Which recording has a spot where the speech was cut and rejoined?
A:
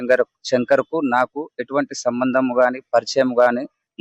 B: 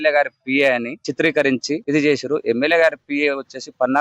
B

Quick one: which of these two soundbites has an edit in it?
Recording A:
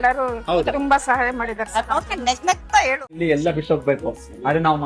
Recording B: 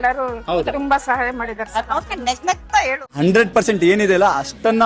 B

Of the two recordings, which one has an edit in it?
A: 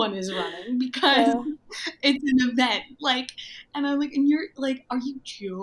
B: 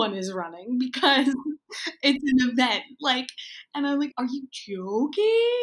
B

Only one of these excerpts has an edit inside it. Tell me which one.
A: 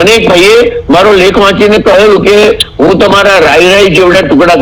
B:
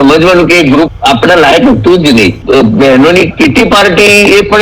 B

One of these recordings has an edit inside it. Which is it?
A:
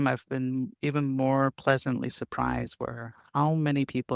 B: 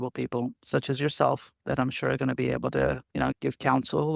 B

